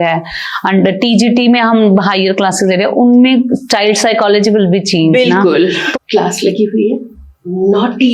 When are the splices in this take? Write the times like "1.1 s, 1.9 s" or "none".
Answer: 5.9 s